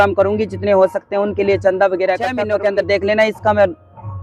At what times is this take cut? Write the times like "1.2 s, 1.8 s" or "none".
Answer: 2.4 s